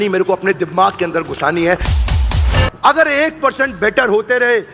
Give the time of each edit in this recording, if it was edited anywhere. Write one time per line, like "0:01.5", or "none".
0:02.2